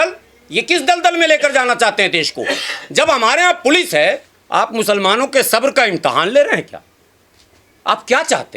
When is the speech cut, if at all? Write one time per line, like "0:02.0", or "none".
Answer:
0:04.3